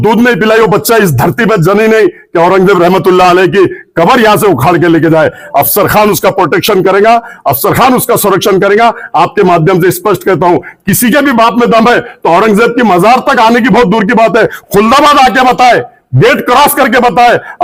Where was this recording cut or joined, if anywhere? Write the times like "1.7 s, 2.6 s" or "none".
none